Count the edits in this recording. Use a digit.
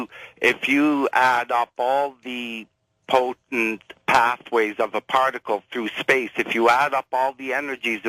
1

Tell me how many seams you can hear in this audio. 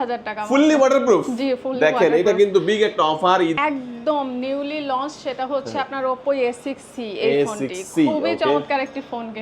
1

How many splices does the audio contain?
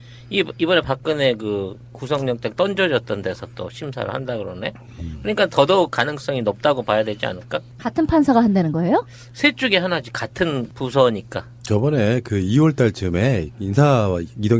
0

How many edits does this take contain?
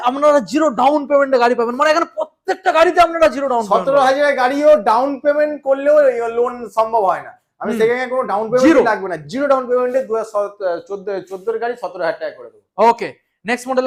0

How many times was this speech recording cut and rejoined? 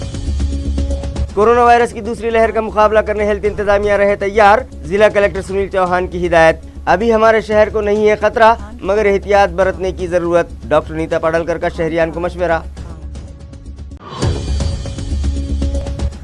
1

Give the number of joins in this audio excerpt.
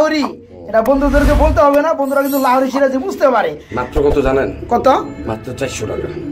1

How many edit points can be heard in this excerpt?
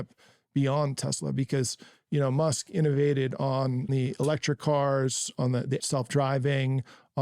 2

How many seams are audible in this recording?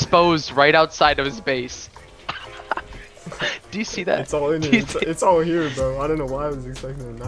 0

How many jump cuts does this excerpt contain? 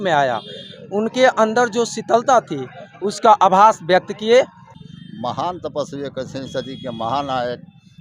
1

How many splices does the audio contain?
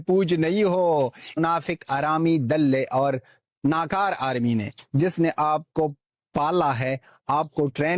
1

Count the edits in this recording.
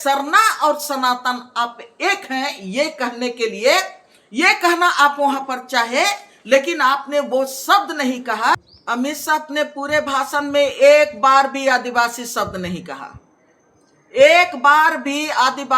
1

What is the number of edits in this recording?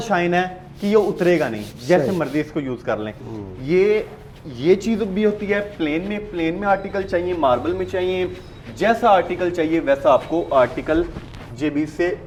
0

